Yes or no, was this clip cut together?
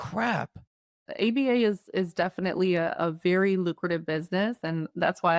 yes